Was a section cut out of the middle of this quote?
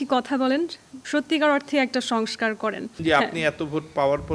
yes; 1 cut; at 3.0 s

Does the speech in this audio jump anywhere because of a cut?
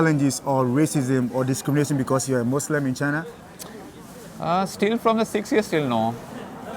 no; 0 cuts

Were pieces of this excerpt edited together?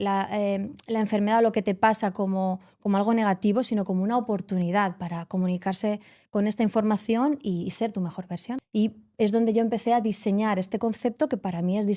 yes; 1 cut; at 8.6 s

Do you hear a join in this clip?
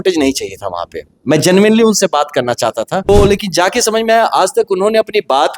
yes; 1 cut; at 3.1 s

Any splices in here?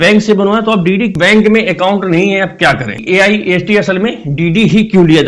yes; 2 cuts; at 1.1 s, 3.0 s

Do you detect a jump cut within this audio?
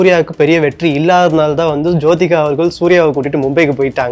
no; 0 cuts

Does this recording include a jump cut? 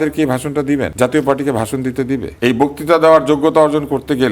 yes; 2 cuts; at 0.9 s, 2.3 s

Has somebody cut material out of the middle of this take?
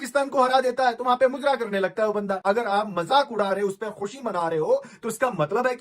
yes; 1 cut; at 2.4 s

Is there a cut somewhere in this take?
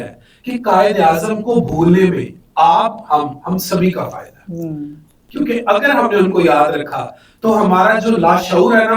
no; 0 cuts

